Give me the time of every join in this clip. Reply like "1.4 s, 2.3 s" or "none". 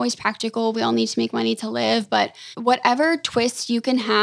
2.4 s